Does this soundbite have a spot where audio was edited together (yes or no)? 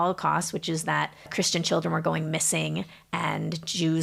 yes